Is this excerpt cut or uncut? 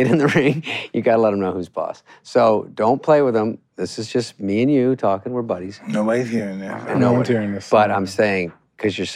uncut